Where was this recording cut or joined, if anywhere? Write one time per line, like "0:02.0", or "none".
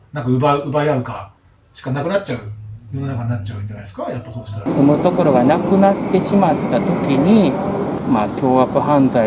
0:04.6
0:08.0